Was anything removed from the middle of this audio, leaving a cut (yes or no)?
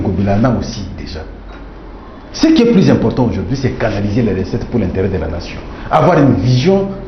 no